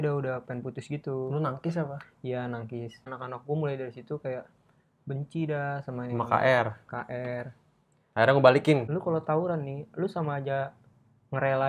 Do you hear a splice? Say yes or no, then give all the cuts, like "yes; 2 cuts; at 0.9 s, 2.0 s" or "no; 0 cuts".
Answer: yes; 2 cuts; at 3.1 s, 8.9 s